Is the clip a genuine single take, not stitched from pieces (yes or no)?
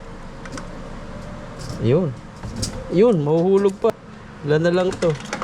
no